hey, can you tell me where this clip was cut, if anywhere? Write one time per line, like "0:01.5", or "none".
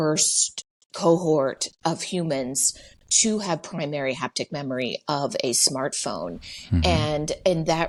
none